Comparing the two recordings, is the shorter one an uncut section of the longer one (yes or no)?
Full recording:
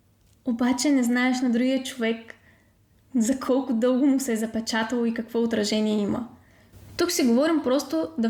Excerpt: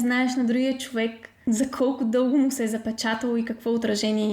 no